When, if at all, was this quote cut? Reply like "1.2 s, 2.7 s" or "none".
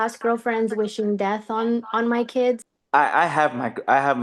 2.7 s